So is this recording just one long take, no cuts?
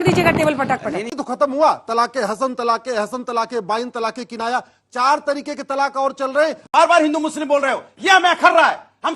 no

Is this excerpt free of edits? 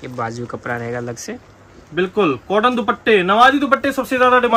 yes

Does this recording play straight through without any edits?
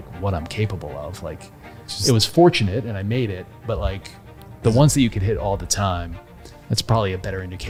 yes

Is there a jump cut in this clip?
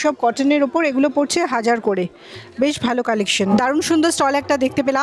yes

